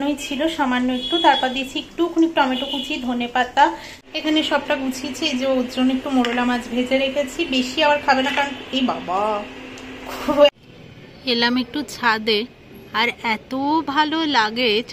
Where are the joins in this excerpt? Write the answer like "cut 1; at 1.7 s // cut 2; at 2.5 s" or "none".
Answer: cut 1; at 3.9 s // cut 2; at 10.6 s